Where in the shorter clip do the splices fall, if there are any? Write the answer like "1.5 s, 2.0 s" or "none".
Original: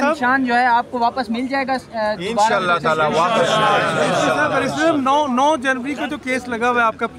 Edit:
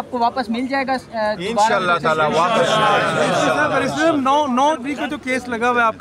4.8 s